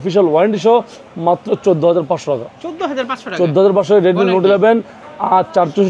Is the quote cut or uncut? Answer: uncut